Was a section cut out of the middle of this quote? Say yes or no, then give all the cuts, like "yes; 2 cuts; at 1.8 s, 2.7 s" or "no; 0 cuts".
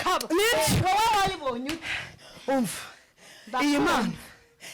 no; 0 cuts